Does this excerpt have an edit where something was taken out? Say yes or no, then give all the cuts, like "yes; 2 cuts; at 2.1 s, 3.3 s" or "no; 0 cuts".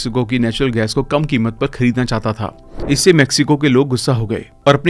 yes; 1 cut; at 2.6 s